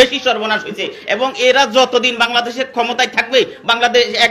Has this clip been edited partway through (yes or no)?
no